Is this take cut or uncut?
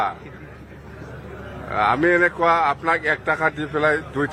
uncut